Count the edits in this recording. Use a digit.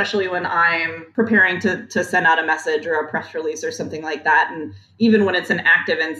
1